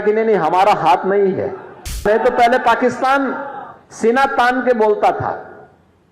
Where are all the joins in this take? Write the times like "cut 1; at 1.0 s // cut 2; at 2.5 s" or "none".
cut 1; at 2.0 s

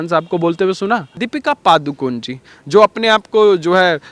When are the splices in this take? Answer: cut 1; at 1.2 s

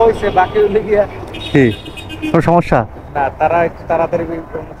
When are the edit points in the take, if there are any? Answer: none

